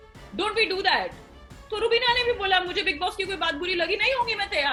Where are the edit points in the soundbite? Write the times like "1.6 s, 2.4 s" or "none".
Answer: none